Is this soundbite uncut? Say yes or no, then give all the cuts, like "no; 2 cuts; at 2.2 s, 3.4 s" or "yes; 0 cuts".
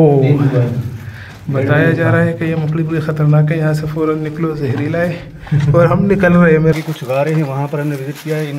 no; 1 cut; at 6.7 s